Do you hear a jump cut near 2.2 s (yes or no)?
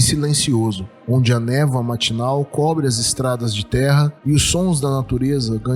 no